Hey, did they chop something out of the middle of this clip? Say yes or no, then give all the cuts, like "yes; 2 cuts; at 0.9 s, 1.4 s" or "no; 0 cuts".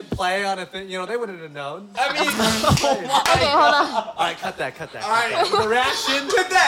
no; 0 cuts